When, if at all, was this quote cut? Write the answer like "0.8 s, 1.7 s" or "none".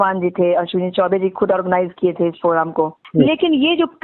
3.0 s

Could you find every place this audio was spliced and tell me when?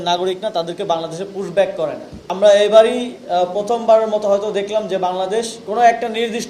2.3 s, 5.6 s

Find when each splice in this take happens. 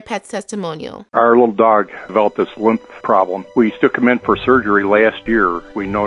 1.0 s

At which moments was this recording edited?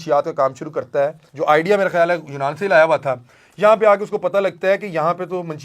1.2 s

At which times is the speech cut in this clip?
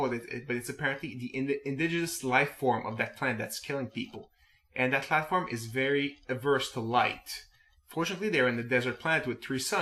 7.6 s

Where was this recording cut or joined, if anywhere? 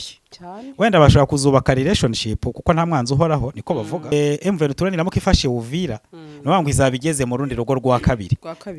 4.1 s

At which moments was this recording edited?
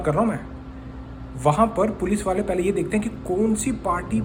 none

